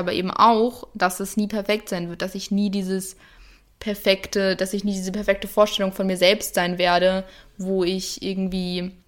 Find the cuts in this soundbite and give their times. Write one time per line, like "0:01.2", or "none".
none